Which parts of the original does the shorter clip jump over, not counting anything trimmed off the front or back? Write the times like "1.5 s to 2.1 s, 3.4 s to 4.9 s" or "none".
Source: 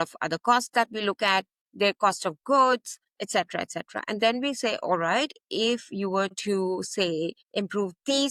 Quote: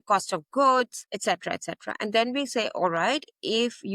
3.0 s to 3.1 s